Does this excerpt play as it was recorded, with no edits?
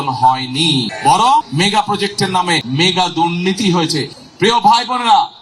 no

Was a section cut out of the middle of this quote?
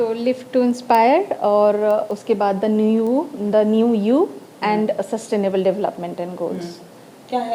no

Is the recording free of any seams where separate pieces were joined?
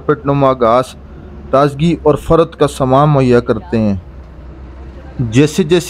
yes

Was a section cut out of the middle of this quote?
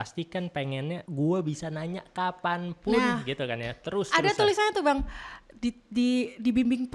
yes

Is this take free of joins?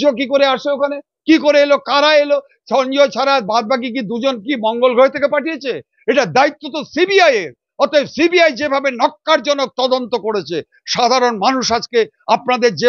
yes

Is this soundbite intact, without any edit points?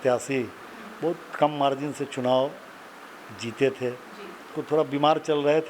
no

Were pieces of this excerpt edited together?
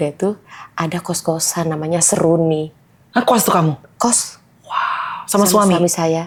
no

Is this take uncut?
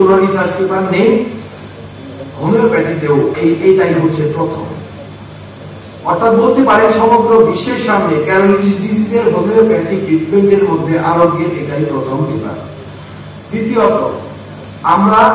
no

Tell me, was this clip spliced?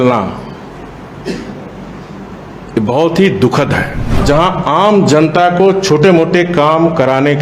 yes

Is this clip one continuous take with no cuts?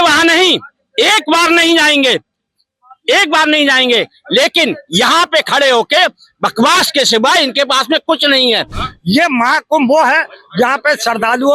no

